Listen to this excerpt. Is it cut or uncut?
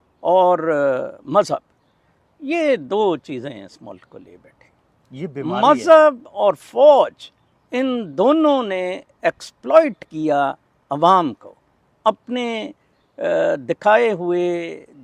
uncut